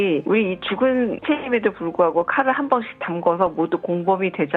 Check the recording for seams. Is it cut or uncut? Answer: uncut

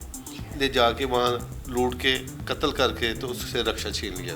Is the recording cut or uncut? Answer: cut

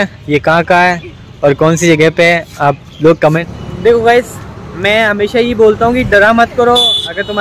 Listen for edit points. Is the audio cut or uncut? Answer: cut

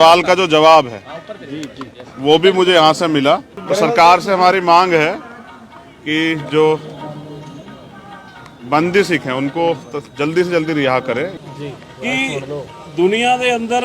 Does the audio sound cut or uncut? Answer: cut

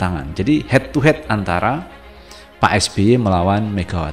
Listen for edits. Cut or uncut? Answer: uncut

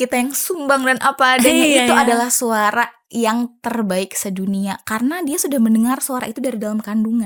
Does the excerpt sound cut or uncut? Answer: uncut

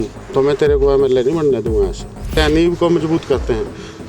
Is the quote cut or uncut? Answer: cut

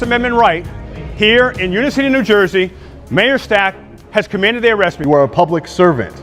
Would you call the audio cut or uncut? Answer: cut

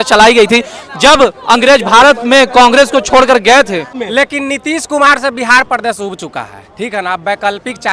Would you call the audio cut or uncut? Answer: cut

